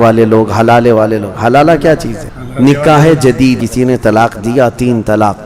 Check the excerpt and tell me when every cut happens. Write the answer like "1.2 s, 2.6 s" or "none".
3.6 s

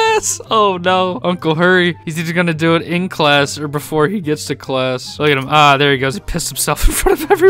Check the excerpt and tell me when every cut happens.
5.1 s

